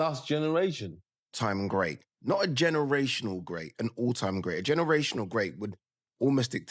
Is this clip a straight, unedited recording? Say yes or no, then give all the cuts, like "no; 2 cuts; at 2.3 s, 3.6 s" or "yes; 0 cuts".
no; 1 cut; at 1.4 s